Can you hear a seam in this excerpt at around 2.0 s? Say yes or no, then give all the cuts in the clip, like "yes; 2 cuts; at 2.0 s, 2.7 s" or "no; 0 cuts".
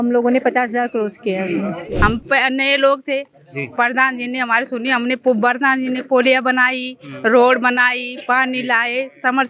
yes; 1 cut; at 2.0 s